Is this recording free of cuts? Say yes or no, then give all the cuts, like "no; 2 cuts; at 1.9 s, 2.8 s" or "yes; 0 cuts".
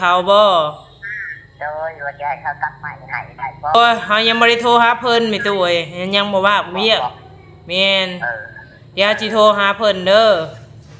no; 1 cut; at 3.8 s